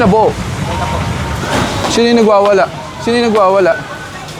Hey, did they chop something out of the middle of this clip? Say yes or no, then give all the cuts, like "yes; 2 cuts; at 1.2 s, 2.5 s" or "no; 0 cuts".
yes; 1 cut; at 1.4 s